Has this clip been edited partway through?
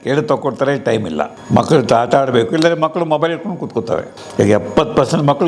yes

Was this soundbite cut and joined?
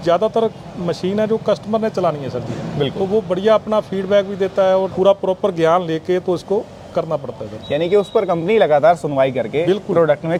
no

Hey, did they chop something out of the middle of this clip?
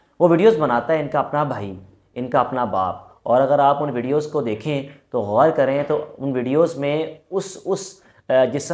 no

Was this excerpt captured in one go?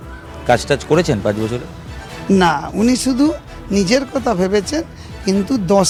yes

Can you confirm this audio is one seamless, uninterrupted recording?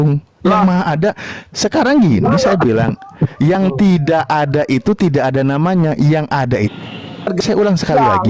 no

